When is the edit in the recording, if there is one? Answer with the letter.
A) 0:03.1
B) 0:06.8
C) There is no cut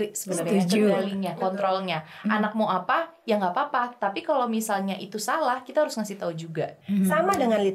B